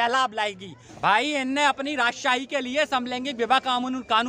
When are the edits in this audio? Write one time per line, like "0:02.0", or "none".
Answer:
0:01.0